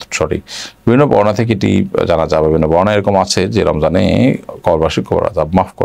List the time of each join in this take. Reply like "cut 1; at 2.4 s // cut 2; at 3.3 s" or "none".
none